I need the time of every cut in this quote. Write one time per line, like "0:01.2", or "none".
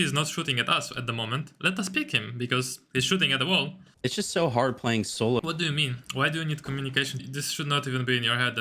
0:03.8
0:05.4
0:07.2